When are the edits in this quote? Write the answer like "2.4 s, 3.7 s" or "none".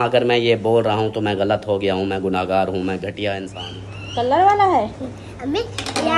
3.6 s